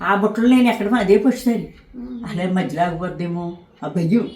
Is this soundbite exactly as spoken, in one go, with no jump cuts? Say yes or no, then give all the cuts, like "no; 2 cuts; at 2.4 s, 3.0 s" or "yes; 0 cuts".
yes; 0 cuts